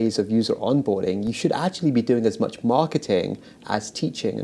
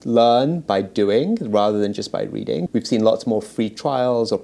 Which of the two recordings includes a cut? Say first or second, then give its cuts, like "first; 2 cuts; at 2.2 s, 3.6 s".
second; 1 cut; at 2.7 s